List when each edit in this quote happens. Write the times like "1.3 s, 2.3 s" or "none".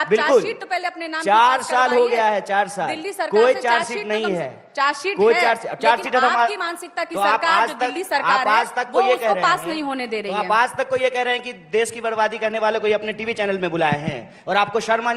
none

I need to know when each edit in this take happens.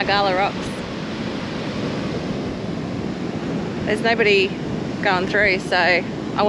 none

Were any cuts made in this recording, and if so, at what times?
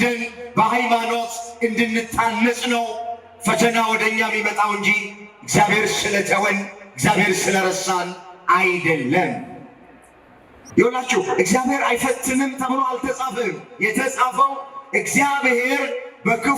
10.6 s

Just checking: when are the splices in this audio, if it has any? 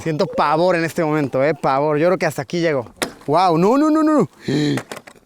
3.0 s

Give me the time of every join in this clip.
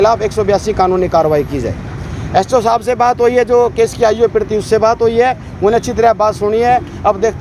none

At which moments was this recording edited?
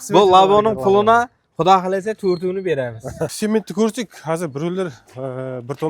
3.3 s

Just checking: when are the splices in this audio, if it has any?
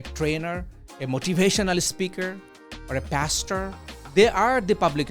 3.9 s

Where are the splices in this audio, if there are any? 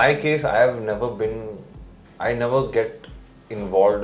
none

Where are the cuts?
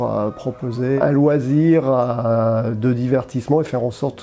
1.0 s

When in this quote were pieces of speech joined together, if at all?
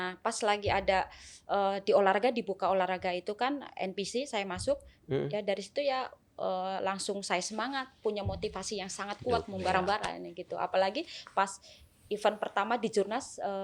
none

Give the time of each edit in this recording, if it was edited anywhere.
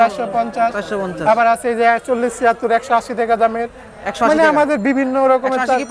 none

